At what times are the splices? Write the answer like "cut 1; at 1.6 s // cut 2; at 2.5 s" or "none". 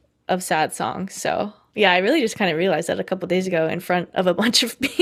none